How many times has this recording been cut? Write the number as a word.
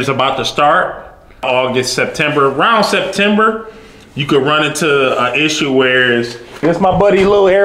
two